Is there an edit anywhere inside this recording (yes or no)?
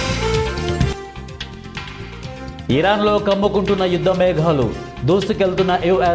no